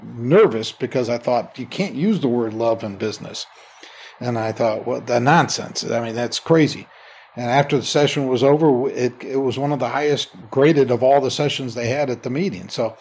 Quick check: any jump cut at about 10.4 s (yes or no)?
yes